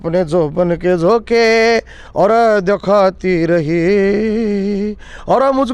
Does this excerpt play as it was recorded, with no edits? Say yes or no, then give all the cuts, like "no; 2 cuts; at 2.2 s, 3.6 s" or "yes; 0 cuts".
yes; 0 cuts